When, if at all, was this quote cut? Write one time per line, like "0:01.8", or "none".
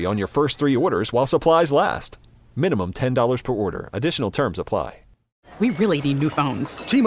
0:05.3